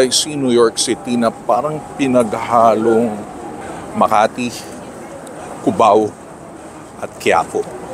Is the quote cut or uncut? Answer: uncut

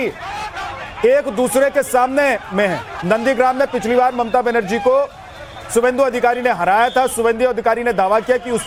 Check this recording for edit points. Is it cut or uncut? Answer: uncut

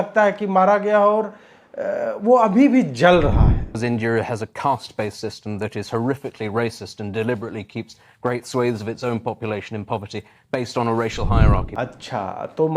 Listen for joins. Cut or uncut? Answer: cut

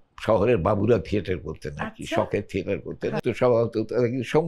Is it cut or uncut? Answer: cut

